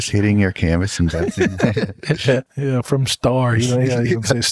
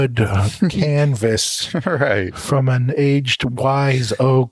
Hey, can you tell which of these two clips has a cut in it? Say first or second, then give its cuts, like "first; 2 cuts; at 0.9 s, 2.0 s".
first; 1 cut; at 2.5 s